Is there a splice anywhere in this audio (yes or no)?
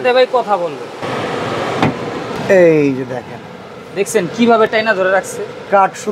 yes